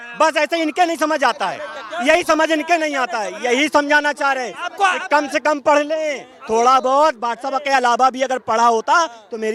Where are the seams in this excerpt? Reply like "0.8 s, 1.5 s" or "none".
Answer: none